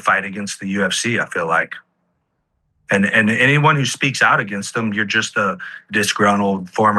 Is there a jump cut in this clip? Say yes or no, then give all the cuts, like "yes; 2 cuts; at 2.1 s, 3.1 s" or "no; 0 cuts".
no; 0 cuts